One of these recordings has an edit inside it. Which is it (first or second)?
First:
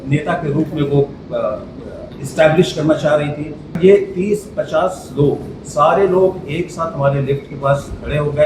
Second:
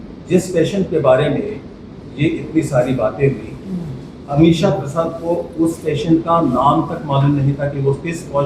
first